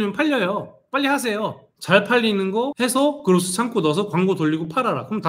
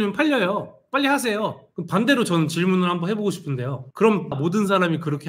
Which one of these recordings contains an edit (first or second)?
second